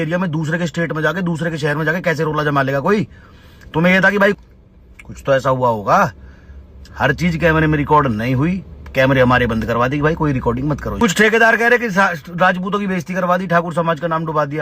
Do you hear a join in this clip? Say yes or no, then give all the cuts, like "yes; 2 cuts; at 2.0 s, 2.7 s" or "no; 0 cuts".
yes; 2 cuts; at 4.4 s, 11.0 s